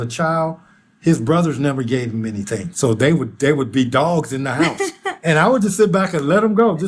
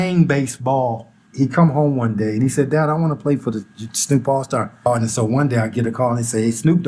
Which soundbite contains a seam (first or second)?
second